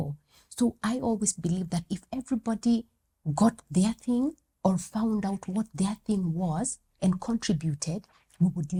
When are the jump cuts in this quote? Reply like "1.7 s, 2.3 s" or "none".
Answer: none